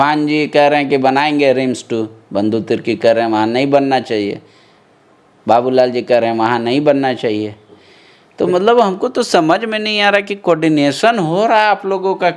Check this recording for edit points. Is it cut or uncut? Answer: uncut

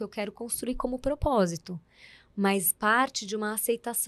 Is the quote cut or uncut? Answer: uncut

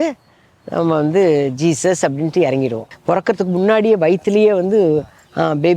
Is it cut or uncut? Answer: cut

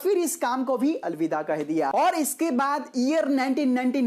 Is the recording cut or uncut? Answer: cut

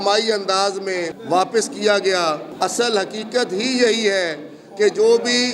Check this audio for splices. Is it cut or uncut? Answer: cut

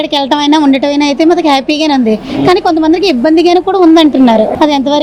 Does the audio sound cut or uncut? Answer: uncut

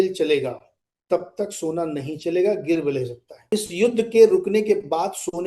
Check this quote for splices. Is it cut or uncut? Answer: cut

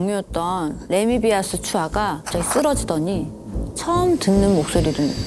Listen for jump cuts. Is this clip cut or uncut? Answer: cut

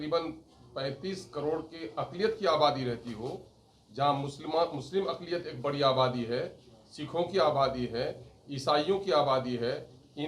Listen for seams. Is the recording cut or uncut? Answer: uncut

